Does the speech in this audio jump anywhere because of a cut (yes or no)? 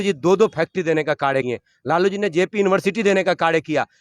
yes